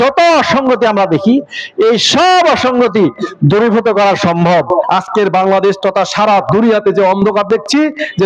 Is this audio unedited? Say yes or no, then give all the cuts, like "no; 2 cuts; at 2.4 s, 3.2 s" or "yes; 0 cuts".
no; 1 cut; at 4.9 s